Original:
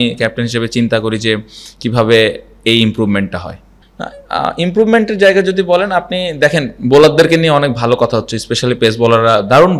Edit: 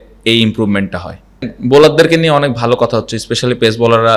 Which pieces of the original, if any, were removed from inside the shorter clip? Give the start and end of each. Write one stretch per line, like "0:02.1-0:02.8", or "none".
0:03.9-0:06.7

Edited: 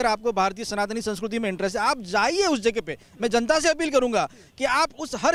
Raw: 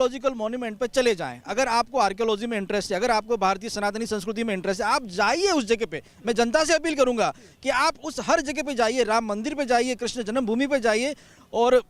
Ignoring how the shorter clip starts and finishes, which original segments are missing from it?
none

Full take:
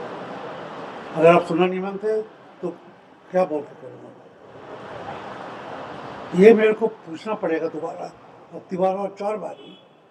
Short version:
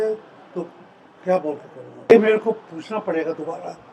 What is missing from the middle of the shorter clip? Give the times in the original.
0:04.2-0:06.5

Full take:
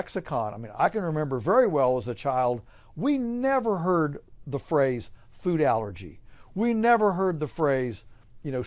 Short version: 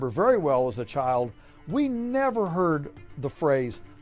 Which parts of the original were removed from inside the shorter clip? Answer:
none

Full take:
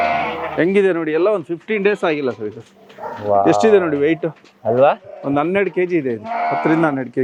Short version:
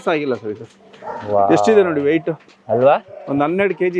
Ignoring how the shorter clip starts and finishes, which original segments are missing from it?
none

